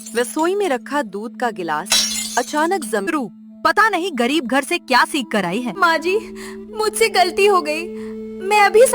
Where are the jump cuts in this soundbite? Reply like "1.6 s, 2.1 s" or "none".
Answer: 3.1 s, 5.8 s